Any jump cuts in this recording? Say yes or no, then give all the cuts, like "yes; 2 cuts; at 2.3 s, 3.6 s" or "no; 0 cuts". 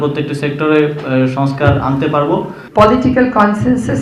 yes; 1 cut; at 2.6 s